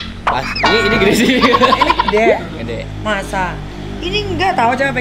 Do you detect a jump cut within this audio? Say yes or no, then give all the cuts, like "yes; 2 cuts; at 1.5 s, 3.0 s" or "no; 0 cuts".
no; 0 cuts